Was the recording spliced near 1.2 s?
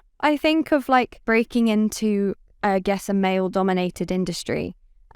yes; 1 cut; at 1.2 s

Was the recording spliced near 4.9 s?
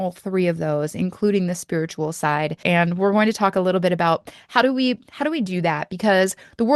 no; 1 cut; at 2.6 s

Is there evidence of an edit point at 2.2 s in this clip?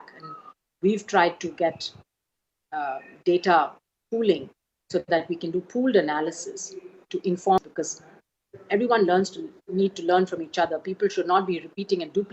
no; 1 cut; at 7.6 s

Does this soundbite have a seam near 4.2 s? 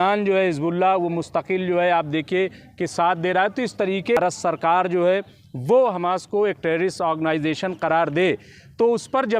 yes; 1 cut; at 4.2 s

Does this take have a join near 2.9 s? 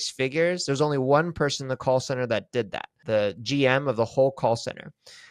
yes; 1 cut; at 2.9 s

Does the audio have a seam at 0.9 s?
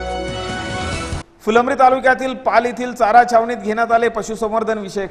yes; 1 cut; at 0.9 s

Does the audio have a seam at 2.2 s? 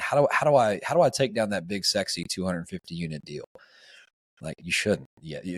no; 0 cuts

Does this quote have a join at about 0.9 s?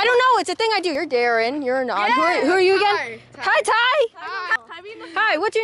no; 0 cuts

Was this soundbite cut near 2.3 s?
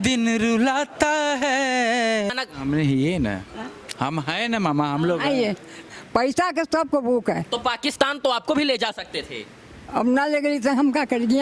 yes; 2 cuts; at 2.3 s, 5.8 s

